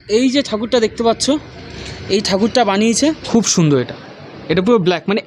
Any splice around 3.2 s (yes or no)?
yes